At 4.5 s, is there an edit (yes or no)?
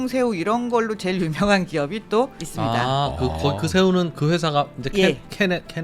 no